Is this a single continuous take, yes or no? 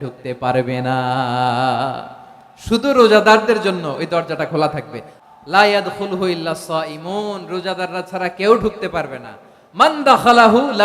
no